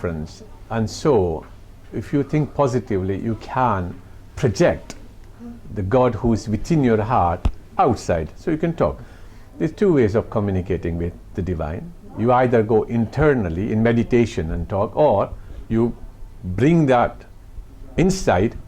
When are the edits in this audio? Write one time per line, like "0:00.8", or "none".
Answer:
none